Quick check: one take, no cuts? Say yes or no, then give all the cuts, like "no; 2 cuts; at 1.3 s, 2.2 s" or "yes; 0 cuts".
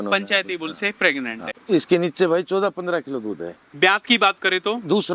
no; 1 cut; at 1.5 s